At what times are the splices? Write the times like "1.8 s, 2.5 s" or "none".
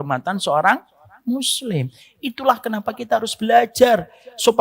none